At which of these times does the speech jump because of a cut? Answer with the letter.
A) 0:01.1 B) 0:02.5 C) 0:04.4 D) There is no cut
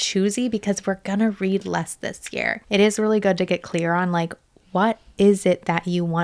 B